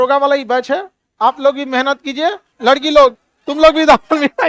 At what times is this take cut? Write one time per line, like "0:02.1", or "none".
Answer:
0:02.5